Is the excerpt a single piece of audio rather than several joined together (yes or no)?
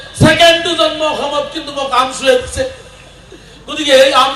yes